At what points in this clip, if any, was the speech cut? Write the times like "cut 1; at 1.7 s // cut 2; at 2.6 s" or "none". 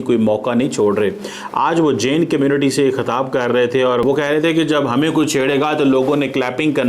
cut 1; at 4.1 s

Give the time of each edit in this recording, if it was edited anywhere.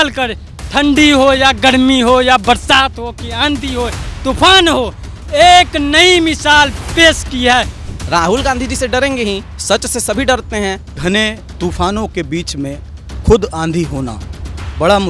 cut 1; at 7.8 s // cut 2; at 9.5 s // cut 3; at 11.0 s

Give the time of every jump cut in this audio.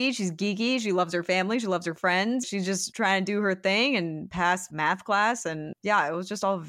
cut 1; at 2.4 s // cut 2; at 4.5 s // cut 3; at 5.7 s

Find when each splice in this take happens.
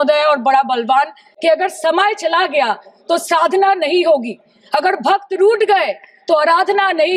cut 1; at 1.2 s

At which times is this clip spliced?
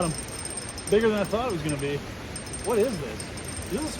none

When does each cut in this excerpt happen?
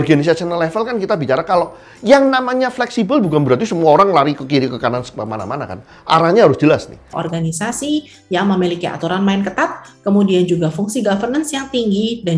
cut 1; at 7.1 s

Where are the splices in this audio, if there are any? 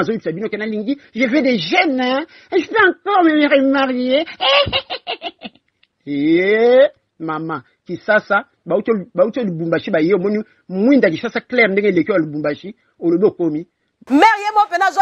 cut 1; at 13.9 s

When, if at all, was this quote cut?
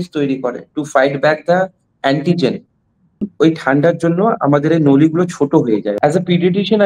cut 1; at 3.3 s // cut 2; at 5.9 s

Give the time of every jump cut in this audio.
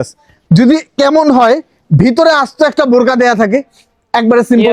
none

